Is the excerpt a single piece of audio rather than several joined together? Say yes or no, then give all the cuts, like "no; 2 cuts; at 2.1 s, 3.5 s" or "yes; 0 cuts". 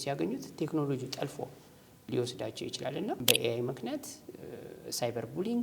no; 1 cut; at 3.2 s